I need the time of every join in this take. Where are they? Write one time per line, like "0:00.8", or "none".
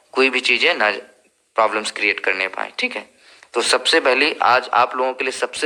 none